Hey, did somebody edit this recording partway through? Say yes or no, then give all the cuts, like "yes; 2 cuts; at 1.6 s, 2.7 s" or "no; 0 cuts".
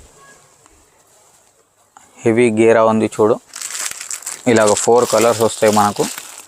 no; 0 cuts